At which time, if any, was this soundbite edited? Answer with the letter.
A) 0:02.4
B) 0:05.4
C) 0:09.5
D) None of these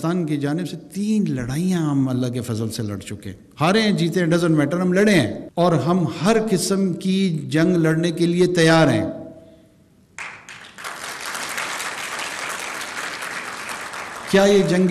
B